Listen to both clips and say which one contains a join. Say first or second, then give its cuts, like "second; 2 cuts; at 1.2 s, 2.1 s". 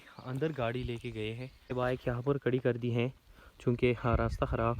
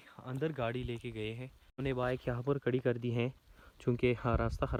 first; 1 cut; at 1.7 s